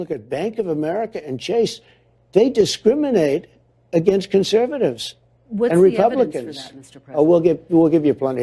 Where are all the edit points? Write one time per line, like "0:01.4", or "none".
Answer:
none